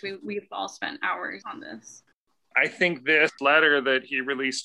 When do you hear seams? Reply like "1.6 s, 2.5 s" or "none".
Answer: 1.4 s, 2.5 s, 3.4 s

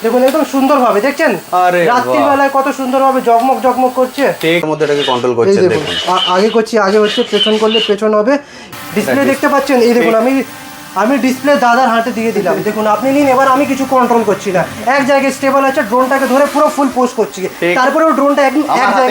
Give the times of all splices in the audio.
4.7 s, 8.7 s

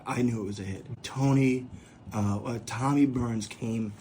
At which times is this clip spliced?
1.0 s

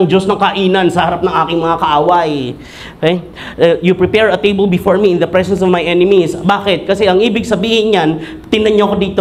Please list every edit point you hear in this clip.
none

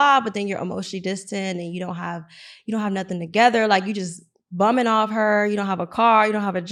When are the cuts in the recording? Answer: none

